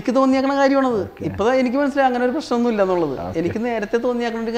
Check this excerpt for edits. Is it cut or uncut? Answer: uncut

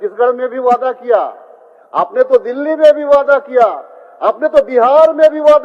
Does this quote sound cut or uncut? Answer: uncut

